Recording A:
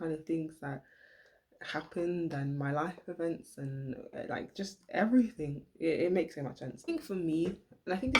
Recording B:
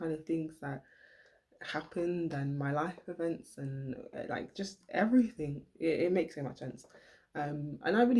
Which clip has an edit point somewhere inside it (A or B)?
A